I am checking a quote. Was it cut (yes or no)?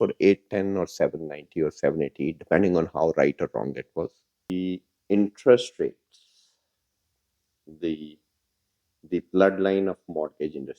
yes